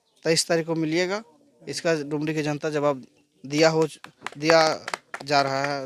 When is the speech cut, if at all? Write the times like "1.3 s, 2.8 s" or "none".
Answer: none